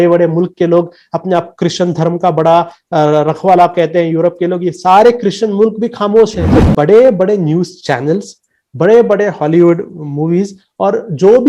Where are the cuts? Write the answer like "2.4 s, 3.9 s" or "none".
6.5 s